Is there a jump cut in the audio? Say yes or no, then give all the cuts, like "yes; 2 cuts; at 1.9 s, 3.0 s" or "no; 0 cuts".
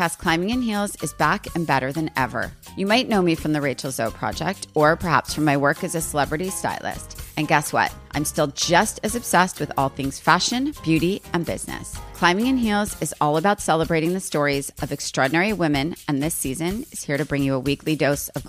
no; 0 cuts